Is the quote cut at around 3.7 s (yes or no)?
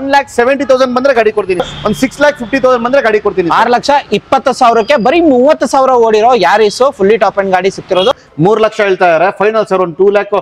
no